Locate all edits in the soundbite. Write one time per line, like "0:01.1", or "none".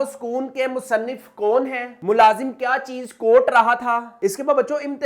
0:01.9